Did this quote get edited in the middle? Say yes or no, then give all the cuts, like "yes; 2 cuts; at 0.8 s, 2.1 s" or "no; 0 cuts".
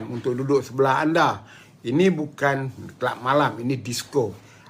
no; 0 cuts